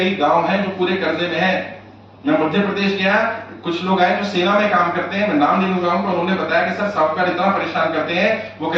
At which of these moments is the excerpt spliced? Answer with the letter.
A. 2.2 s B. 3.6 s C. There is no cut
C